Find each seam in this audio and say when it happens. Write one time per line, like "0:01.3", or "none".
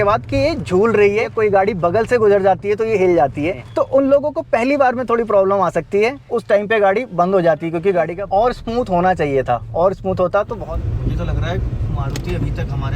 0:01.3
0:03.6
0:06.3
0:08.2
0:10.6